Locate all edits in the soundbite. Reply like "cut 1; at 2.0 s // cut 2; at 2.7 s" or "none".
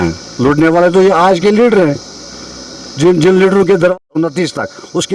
cut 1; at 3.9 s